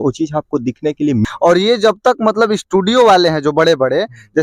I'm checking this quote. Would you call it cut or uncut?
cut